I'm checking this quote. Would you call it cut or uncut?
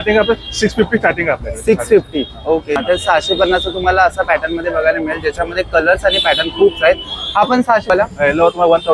cut